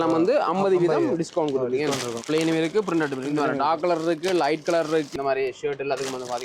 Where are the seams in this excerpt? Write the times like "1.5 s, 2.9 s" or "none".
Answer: 2.1 s, 5.1 s

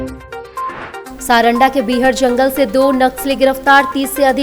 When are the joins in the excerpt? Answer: none

